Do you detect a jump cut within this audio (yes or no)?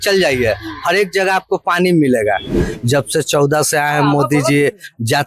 yes